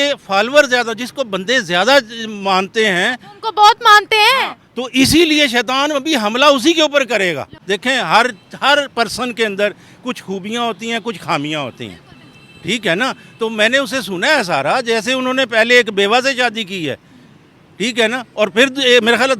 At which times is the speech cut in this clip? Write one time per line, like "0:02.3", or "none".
0:07.5